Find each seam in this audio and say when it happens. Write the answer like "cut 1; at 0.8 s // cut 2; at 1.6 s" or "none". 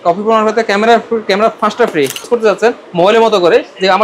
cut 1; at 2.2 s